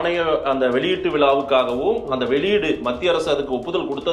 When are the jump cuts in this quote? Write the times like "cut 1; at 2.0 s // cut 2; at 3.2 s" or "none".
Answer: none